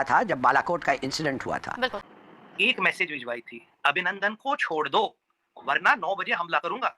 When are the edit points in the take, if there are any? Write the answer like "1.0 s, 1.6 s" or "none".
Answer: 2.1 s